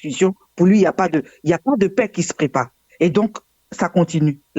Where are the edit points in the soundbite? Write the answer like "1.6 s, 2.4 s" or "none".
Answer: none